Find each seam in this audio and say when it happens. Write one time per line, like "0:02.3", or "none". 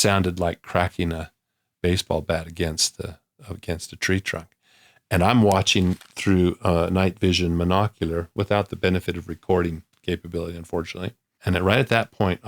0:11.3